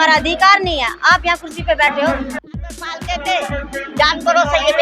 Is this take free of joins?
no; 1 cut; at 2.5 s

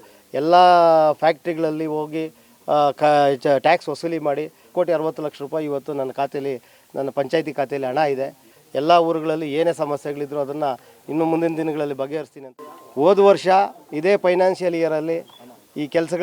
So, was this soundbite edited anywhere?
yes; 3 cuts; at 4.7 s, 8.5 s, 12.5 s

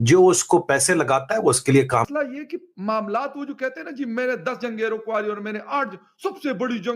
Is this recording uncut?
no; 1 cut; at 2.1 s

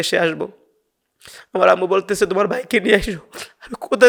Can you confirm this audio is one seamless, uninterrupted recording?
yes; 0 cuts

